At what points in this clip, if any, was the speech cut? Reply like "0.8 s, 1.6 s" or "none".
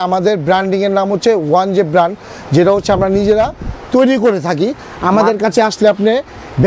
none